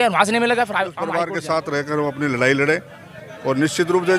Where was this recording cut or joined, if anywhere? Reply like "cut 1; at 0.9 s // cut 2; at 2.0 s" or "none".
cut 1; at 1.0 s

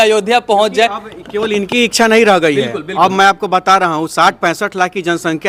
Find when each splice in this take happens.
none

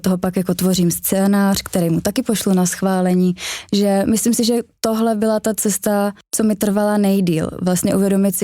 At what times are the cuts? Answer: cut 1; at 6.2 s

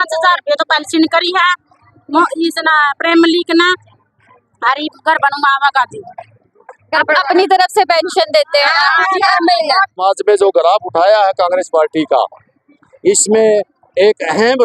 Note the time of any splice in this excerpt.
cut 1; at 10.0 s

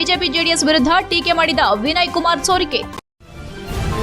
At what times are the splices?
cut 1; at 2.9 s

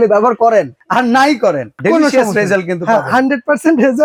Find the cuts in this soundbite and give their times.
none

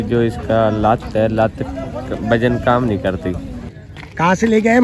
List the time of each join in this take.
cut 1; at 3.6 s

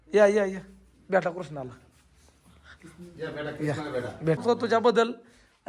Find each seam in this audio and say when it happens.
cut 1; at 4.4 s

